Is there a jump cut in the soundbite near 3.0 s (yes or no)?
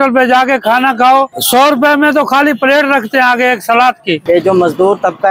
no